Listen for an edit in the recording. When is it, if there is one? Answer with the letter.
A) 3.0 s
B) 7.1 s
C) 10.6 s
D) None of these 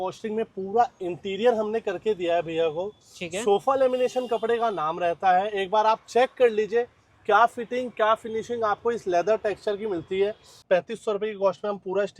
C